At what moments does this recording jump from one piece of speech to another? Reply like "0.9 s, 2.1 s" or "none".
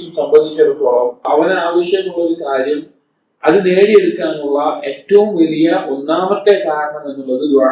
1.3 s